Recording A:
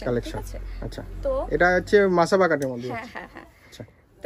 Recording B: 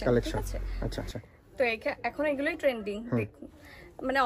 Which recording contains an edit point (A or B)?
B